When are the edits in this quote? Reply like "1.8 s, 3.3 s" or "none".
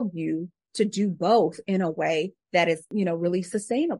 2.9 s